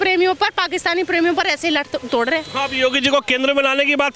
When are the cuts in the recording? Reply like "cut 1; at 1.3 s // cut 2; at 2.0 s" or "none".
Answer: none

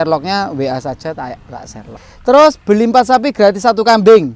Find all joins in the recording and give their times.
cut 1; at 1.9 s

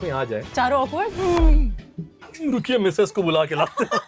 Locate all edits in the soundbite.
none

